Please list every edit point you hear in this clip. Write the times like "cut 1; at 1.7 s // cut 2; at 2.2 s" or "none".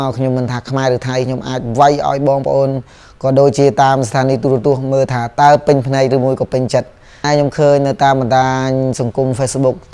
cut 1; at 7.2 s